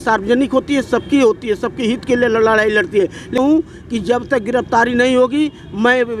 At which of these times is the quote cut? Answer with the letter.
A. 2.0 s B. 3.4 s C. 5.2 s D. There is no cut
B